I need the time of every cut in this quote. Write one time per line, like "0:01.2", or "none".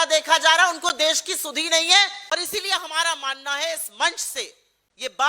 0:02.3